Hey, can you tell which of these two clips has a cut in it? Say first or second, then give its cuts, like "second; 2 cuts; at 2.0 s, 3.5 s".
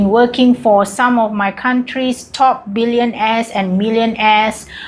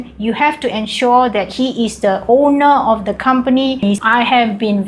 second; 1 cut; at 3.8 s